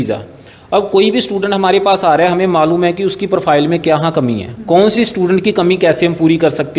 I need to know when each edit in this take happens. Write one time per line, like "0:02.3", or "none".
none